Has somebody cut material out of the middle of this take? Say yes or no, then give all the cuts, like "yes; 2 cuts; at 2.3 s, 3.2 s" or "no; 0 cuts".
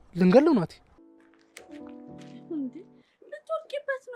yes; 1 cut; at 1.0 s